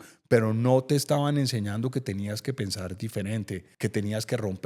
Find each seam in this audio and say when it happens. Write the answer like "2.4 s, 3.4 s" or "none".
3.7 s